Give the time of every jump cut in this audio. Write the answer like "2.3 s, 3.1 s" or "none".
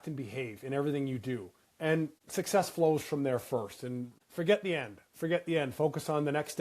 2.1 s, 4.2 s